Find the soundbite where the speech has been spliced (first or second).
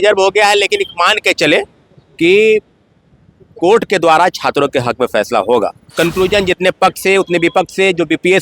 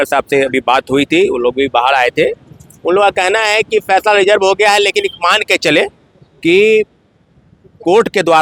first